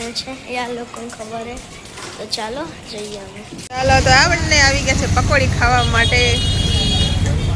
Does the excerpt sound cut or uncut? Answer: uncut